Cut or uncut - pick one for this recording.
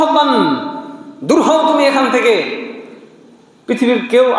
uncut